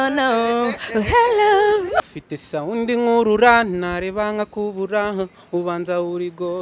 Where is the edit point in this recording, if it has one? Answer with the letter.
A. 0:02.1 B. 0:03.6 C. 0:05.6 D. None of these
A